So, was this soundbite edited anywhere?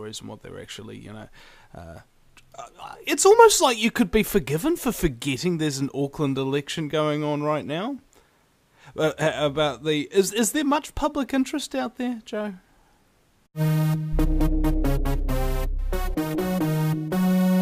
no; 0 cuts

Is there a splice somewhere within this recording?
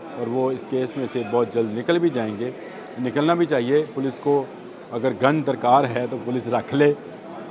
no; 0 cuts

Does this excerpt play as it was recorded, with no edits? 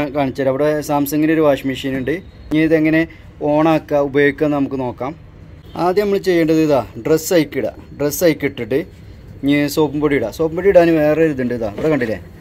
no; 2 cuts; at 2.4 s, 5.9 s

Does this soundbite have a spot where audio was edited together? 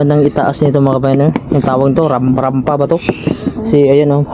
no; 0 cuts

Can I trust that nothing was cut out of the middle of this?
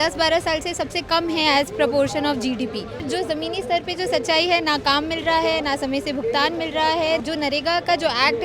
no; 2 cuts; at 3.1 s, 7.2 s

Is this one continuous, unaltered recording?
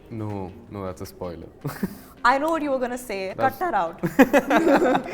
no; 1 cut; at 3.3 s

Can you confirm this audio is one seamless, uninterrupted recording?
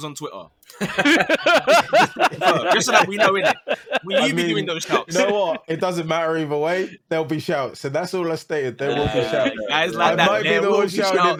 yes; 0 cuts

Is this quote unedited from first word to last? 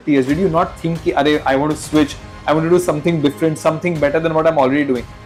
yes; 0 cuts

